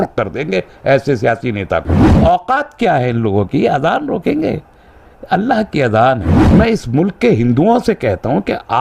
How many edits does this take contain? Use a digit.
2